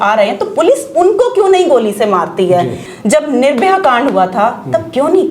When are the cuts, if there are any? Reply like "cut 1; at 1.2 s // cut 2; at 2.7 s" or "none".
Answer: cut 1; at 2.8 s